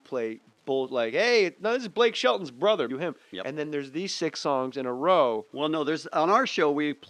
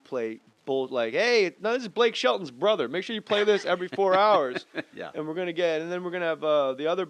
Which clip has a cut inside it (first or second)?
second